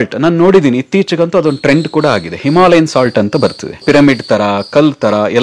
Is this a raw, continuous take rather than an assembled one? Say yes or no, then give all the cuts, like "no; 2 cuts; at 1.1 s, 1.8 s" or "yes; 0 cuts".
no; 1 cut; at 3.8 s